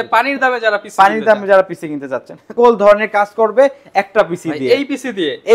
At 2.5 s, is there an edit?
yes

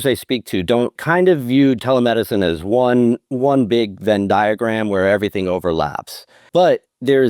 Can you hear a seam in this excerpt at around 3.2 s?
no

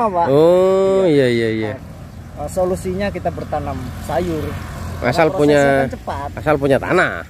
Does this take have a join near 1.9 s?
yes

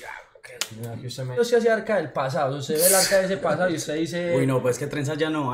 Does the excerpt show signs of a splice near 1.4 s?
yes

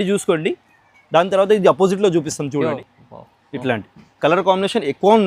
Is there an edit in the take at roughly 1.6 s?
no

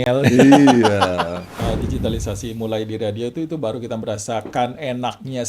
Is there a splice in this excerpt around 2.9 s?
no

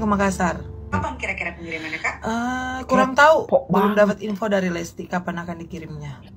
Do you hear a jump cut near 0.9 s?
yes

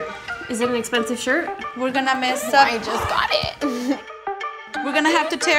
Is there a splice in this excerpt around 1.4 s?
no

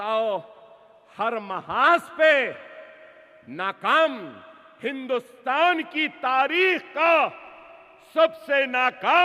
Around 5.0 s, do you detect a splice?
no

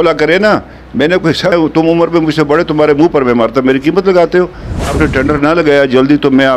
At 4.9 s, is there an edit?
yes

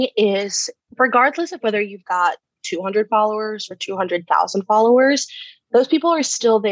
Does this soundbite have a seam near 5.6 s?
no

